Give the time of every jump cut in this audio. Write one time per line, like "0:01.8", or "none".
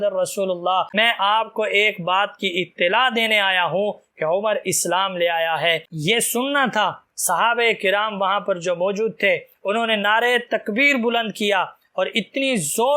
0:00.9
0:06.0